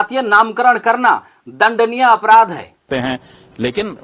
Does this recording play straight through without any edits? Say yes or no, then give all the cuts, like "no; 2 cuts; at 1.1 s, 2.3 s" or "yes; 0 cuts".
no; 1 cut; at 2.8 s